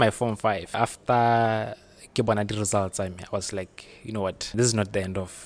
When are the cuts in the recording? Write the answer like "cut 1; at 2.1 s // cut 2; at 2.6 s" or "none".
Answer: cut 1; at 0.8 s // cut 2; at 4.5 s

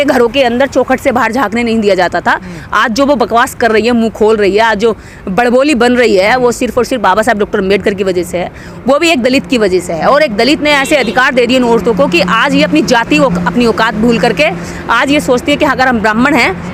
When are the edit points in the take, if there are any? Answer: none

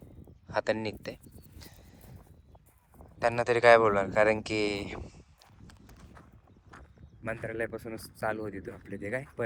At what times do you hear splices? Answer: none

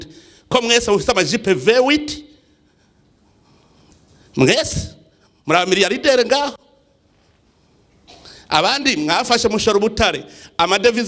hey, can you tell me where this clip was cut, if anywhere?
none

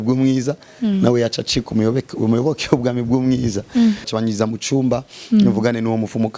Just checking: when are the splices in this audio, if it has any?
cut 1; at 4.0 s

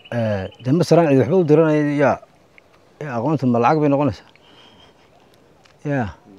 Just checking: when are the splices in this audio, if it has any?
none

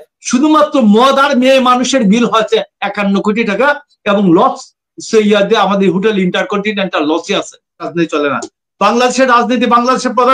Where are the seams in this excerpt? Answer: cut 1; at 7.8 s

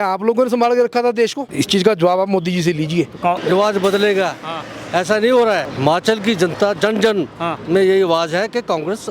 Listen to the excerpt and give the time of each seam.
cut 1; at 1.4 s // cut 2; at 3.4 s // cut 3; at 5.7 s

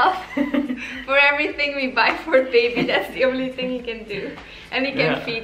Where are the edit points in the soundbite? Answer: none

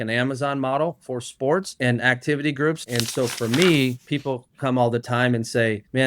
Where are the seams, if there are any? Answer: cut 1; at 2.8 s

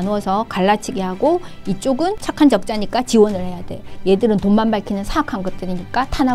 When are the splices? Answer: cut 1; at 2.2 s

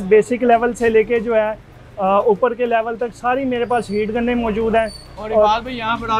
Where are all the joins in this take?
none

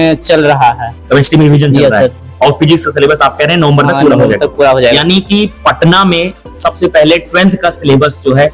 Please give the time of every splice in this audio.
none

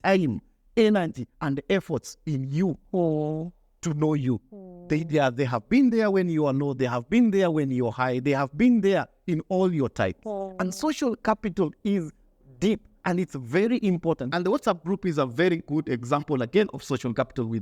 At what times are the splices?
cut 1; at 14.2 s

